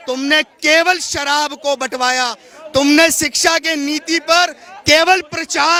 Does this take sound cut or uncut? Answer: uncut